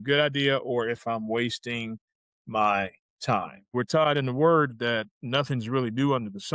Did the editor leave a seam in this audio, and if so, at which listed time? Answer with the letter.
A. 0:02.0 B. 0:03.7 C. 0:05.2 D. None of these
B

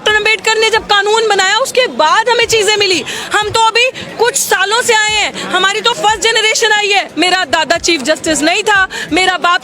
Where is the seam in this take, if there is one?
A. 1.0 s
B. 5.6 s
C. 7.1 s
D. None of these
C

